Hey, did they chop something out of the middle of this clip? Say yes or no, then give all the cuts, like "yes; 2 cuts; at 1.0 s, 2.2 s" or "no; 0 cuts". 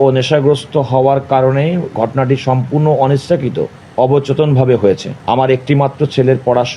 yes; 2 cuts; at 3.8 s, 5.1 s